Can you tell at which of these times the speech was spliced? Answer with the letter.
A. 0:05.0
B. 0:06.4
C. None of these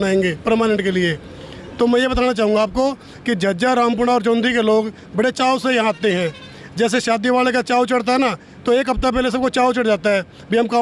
C